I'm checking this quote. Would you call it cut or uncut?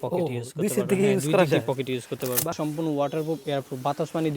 cut